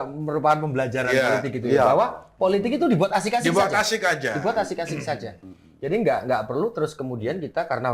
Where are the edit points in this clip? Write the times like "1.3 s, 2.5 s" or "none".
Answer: none